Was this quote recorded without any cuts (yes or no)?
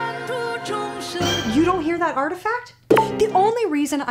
no